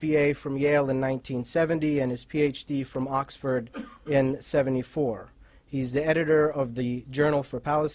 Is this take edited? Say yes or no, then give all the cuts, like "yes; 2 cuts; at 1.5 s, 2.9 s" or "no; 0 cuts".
no; 0 cuts